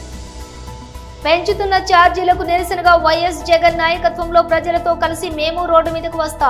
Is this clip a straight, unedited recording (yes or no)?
no